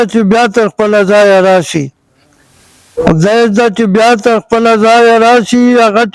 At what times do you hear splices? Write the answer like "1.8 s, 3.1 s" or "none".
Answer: none